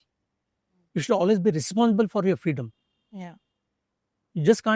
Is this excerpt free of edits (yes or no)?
yes